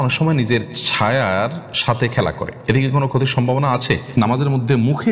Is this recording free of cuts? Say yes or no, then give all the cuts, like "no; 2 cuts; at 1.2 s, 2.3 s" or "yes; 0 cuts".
no; 2 cuts; at 2.5 s, 4.2 s